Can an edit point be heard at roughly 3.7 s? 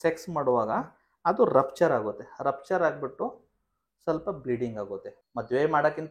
no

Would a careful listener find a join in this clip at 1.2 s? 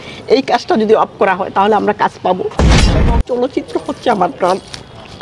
no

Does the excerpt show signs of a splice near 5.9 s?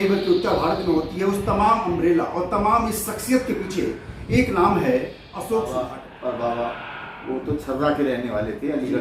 yes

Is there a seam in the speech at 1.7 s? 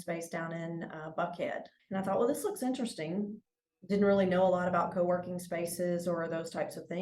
yes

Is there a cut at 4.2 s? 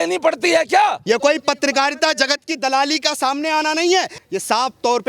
yes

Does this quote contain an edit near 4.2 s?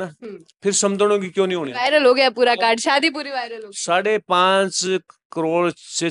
no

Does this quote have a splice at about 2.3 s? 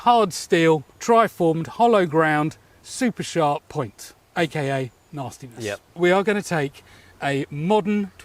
no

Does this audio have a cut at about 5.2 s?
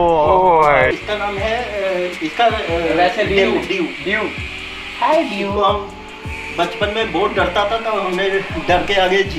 no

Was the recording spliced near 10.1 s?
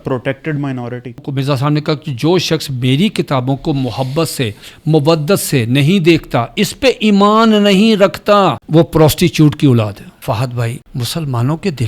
yes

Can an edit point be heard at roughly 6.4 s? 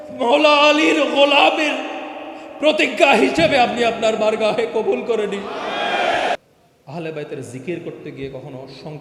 yes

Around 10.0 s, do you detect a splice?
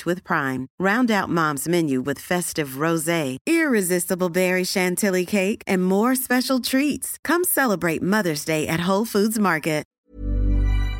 yes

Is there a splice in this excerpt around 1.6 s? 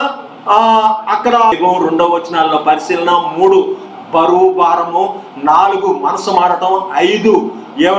yes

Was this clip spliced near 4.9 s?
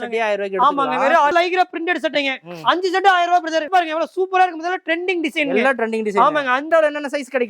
no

